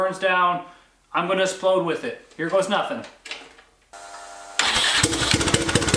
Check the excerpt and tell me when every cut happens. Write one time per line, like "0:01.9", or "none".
0:03.9